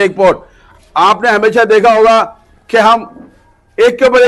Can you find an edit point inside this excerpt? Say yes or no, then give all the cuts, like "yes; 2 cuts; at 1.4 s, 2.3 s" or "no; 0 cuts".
no; 0 cuts